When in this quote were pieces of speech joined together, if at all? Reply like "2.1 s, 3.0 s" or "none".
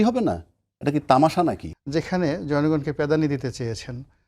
1.7 s

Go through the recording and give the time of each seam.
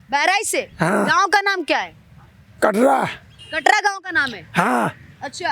none

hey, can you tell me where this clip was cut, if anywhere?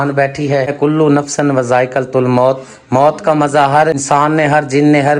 0.7 s, 4.0 s

